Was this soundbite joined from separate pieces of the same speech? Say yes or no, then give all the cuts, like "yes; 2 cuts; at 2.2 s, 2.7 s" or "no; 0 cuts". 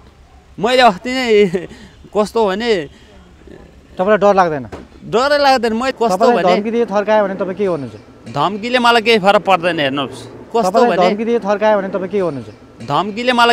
yes; 2 cuts; at 5.9 s, 10.4 s